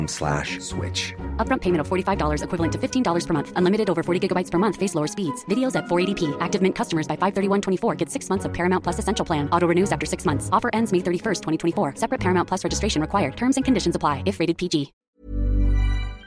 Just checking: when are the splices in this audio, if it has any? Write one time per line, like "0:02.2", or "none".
0:15.0

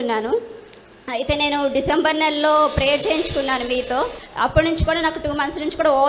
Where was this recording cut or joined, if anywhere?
0:04.1

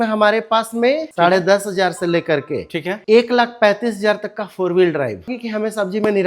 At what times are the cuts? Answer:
0:01.1
0:05.3

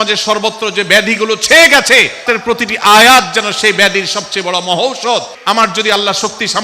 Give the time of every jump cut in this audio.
0:02.2
0:05.3

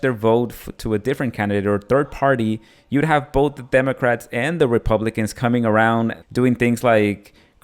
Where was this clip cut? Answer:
0:06.2

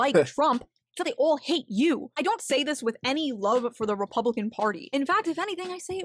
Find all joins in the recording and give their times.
0:02.2

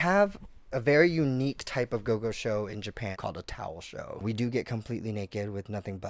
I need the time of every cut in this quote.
0:03.2
0:04.2

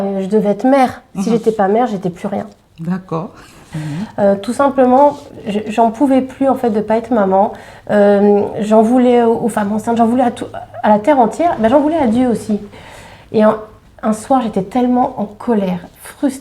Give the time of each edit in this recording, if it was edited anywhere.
0:03.7
0:12.7

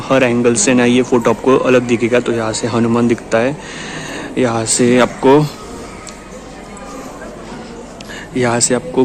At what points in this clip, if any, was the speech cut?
none

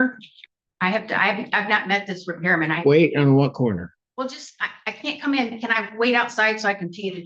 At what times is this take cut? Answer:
none

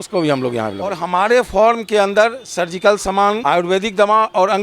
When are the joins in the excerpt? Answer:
0:01.0
0:03.4

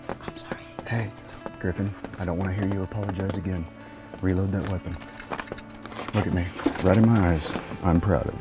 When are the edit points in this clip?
0:05.8

